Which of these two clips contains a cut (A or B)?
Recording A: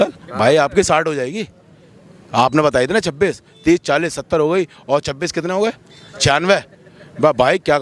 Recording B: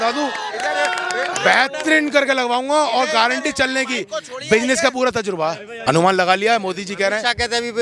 B